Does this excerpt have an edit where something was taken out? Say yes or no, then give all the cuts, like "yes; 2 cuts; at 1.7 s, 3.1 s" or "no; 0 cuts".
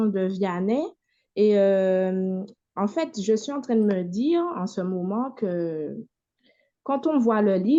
no; 0 cuts